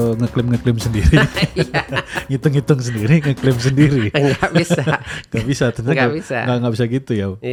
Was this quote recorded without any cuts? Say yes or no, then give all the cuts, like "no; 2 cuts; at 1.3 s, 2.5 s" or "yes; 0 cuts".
yes; 0 cuts